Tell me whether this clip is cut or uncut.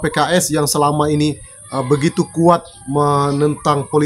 uncut